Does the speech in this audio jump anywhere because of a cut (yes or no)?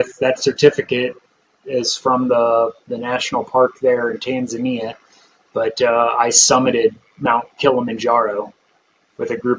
no